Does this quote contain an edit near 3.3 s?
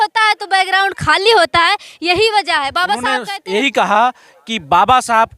yes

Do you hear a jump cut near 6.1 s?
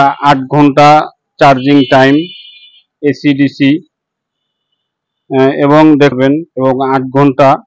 yes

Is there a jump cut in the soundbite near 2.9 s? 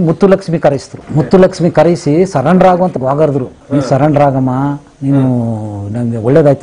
yes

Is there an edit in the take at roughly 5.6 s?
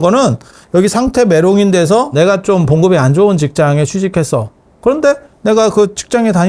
no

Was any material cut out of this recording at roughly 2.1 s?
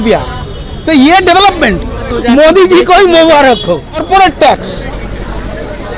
yes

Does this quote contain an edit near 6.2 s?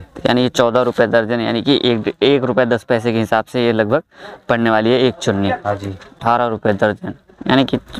yes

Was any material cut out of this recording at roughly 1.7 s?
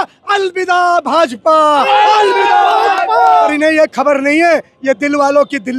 no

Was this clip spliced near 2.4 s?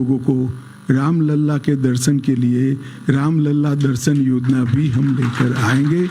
no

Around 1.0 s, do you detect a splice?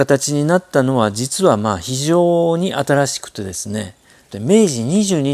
no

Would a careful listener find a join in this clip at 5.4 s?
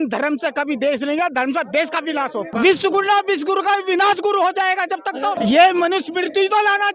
yes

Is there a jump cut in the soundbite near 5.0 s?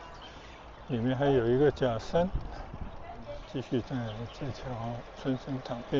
no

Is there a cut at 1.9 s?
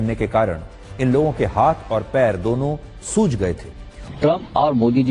no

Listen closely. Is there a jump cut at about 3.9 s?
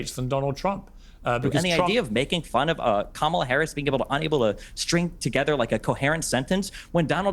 no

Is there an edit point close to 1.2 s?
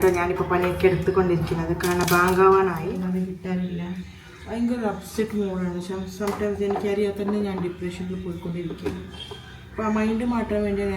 no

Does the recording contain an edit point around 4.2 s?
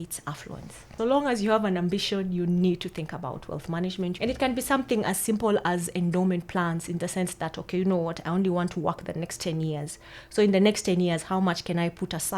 yes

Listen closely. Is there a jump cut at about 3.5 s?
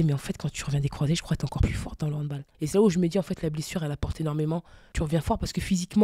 no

